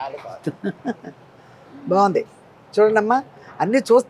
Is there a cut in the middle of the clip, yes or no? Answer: no